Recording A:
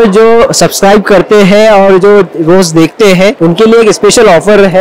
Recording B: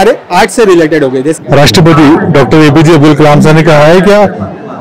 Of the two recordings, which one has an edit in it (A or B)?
B